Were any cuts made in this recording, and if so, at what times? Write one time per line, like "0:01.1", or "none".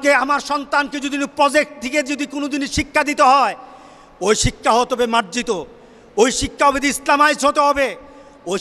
none